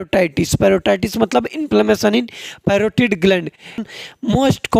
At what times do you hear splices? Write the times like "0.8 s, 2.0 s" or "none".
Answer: 3.9 s